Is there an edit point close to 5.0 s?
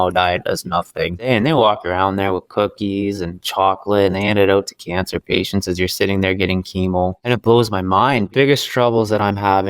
no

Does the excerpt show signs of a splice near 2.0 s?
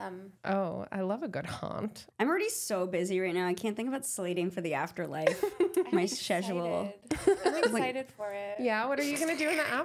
yes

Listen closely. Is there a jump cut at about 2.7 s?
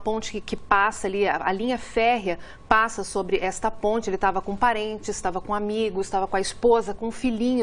no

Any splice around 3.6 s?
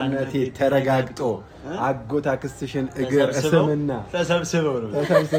no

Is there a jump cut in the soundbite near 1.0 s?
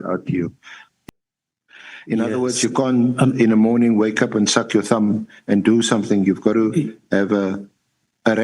yes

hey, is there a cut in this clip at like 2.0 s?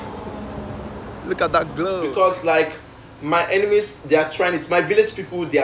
yes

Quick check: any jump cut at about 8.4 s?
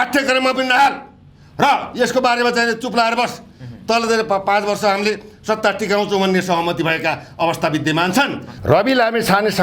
yes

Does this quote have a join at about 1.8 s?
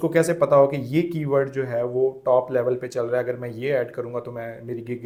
no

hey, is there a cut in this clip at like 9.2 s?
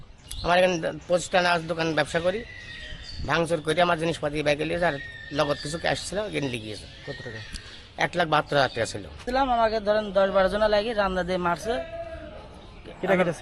yes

